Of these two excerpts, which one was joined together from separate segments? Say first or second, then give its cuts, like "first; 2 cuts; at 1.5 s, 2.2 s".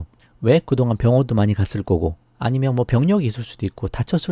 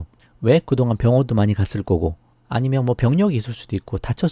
first; 1 cut; at 2.3 s